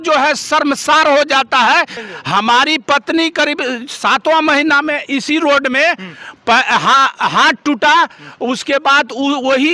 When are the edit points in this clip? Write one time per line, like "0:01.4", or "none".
0:02.0